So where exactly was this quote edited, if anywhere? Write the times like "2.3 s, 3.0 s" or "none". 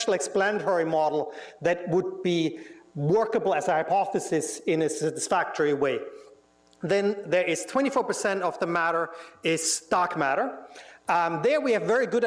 none